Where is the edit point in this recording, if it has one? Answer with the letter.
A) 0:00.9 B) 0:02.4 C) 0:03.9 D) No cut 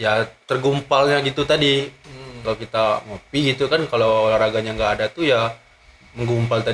B